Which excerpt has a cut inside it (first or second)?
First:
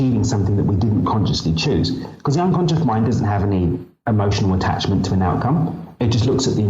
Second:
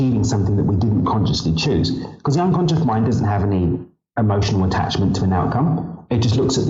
first